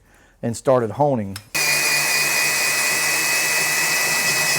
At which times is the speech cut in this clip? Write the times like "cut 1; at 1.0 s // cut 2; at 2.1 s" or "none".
cut 1; at 1.5 s